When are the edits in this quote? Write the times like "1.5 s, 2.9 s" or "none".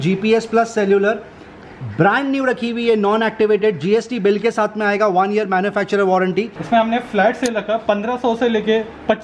6.6 s